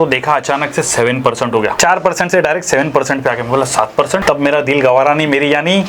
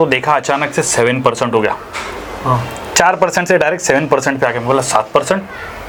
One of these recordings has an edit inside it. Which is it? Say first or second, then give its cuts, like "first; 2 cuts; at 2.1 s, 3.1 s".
first; 2 cuts; at 1.7 s, 4.2 s